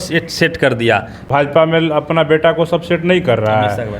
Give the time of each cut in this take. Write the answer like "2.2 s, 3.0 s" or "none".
1.1 s